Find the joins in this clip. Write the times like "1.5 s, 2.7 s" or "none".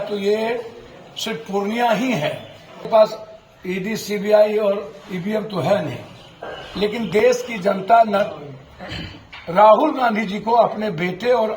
2.8 s